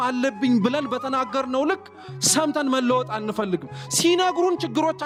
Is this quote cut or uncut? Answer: uncut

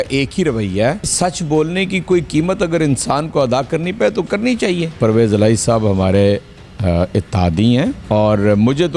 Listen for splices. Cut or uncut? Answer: cut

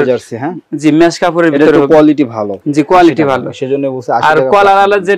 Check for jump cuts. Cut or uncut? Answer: uncut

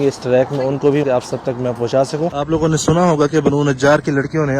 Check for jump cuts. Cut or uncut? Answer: cut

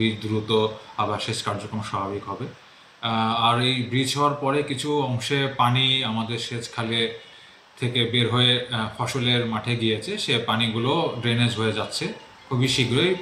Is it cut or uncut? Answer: uncut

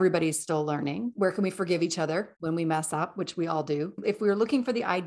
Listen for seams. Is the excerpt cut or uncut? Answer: cut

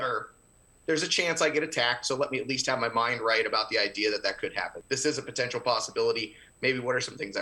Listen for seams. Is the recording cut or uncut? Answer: cut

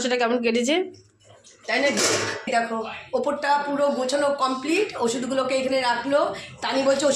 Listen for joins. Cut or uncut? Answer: cut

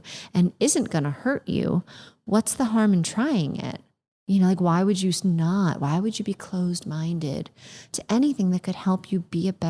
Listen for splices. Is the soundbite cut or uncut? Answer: uncut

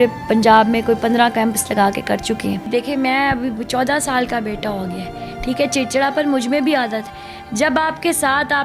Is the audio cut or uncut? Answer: cut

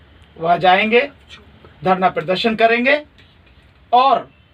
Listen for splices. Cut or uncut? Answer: uncut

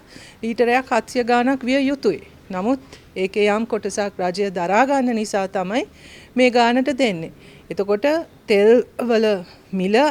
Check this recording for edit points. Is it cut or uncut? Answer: uncut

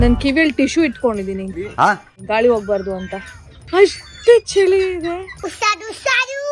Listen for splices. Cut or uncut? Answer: cut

